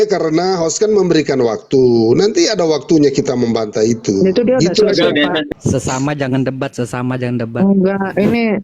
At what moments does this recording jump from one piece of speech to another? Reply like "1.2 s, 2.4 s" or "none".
5.5 s